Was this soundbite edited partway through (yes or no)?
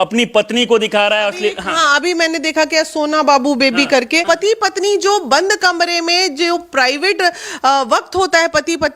yes